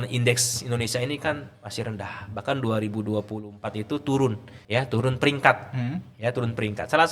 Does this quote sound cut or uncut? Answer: cut